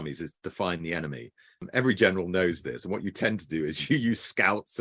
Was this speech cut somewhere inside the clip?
yes; 1 cut; at 1.7 s

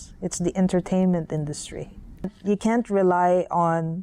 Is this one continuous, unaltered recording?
no; 1 cut; at 2.4 s

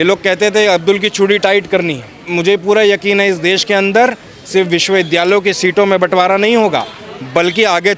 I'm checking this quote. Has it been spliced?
yes; 1 cut; at 2.3 s

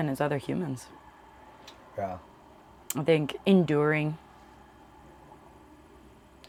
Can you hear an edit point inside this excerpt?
no; 0 cuts

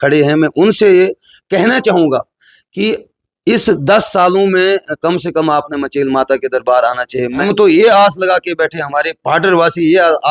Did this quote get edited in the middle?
yes; 1 cut; at 7.4 s

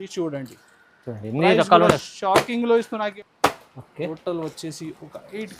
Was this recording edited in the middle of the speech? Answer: yes; 1 cut; at 3.1 s

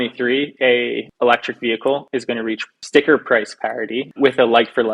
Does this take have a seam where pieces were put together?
yes; 3 cuts; at 1.1 s, 2.3 s, 4.1 s

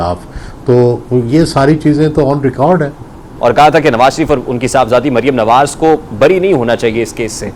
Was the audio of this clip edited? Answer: yes; 1 cut; at 3.2 s

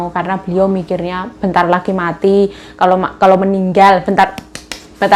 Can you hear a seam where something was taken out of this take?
no; 0 cuts

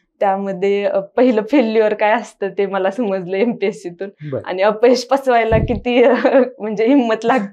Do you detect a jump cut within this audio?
no; 0 cuts

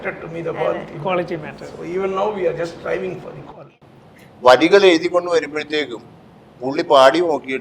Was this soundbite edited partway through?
yes; 1 cut; at 3.4 s

